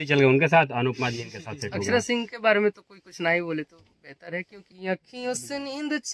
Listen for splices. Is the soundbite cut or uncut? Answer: cut